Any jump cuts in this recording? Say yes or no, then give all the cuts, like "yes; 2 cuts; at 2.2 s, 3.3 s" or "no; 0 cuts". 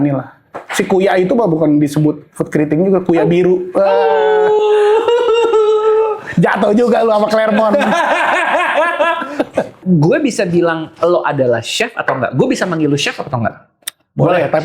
yes; 1 cut; at 9.8 s